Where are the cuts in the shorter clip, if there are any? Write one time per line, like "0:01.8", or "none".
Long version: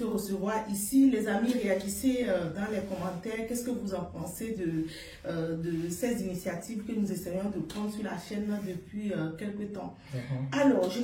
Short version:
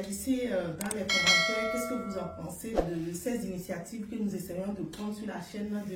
0:02.8